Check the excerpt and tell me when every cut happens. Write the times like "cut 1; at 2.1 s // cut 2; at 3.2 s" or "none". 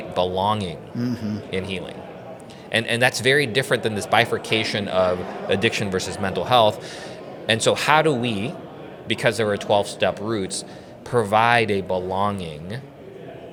none